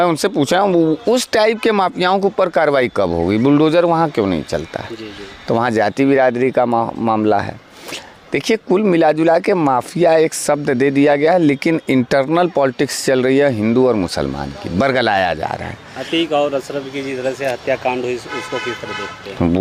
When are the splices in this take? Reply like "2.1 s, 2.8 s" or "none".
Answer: none